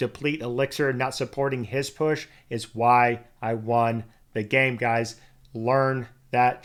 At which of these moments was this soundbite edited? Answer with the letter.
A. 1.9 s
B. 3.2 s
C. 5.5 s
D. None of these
D